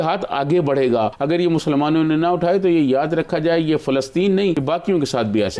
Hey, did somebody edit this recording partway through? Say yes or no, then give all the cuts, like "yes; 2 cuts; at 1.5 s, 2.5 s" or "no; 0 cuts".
yes; 2 cuts; at 1.2 s, 4.6 s